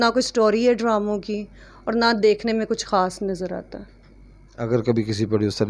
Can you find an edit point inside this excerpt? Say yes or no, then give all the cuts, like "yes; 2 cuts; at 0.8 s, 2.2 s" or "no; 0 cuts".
no; 0 cuts